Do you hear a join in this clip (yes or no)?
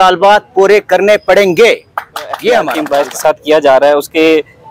yes